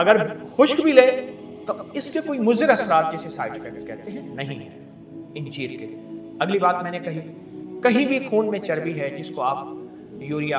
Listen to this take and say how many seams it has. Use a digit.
0